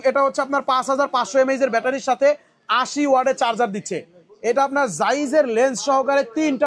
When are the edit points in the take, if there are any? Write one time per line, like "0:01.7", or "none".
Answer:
none

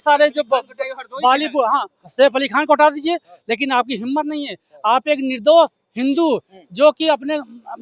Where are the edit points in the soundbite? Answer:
none

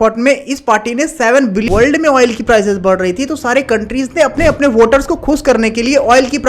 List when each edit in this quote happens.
0:01.6
0:04.4

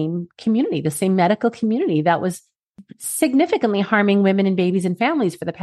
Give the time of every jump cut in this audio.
none

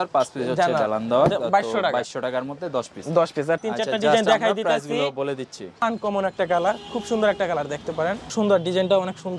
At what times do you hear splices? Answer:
0:03.6
0:05.8
0:08.3

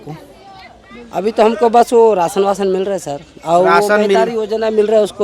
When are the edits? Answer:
none

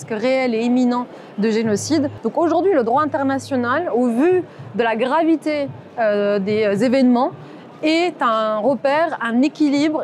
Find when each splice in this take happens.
0:02.2

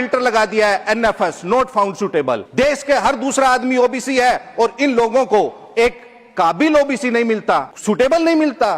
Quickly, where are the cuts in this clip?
0:02.5
0:07.7

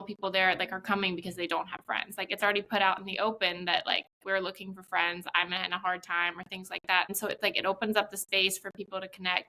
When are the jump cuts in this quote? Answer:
0:07.1

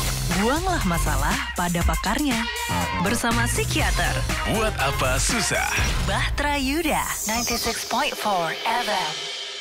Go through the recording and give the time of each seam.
none

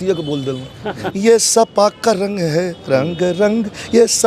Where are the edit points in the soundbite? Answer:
0:01.1

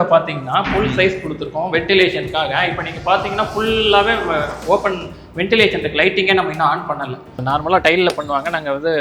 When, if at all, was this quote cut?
0:07.4

